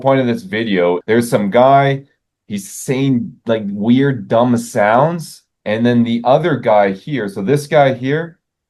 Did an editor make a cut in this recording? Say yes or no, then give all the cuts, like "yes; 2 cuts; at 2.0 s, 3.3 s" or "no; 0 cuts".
yes; 1 cut; at 1.0 s